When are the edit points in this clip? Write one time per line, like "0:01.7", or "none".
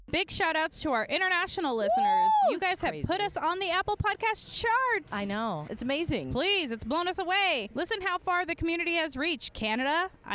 0:05.7